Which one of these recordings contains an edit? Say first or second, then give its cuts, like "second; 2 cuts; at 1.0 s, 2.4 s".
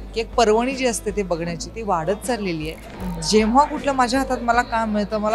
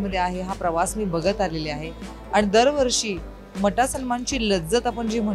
first; 1 cut; at 3.1 s